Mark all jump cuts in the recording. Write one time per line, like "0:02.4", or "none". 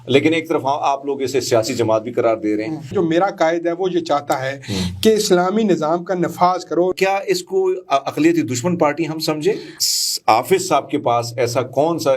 0:02.9
0:06.9
0:09.7